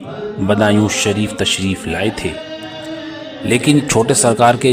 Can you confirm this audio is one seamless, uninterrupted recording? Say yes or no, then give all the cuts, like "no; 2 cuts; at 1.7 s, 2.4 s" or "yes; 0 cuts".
yes; 0 cuts